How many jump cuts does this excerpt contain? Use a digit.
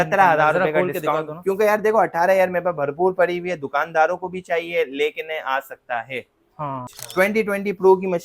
1